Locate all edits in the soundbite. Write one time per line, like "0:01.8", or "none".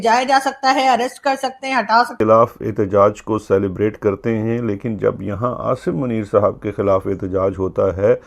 0:02.2